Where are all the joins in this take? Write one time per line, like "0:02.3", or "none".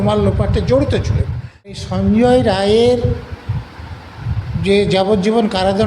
0:01.7